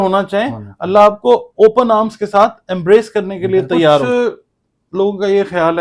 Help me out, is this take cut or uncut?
cut